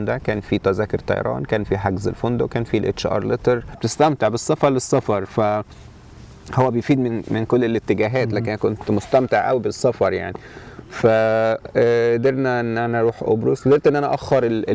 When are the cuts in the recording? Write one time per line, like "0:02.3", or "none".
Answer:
0:03.9